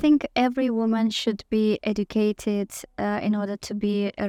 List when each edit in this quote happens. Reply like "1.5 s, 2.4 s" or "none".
none